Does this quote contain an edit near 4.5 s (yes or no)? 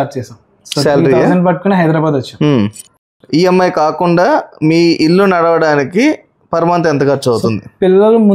no